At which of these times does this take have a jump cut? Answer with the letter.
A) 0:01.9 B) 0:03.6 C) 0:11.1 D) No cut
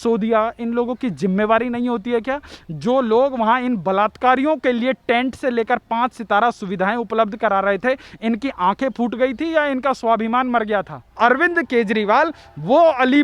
C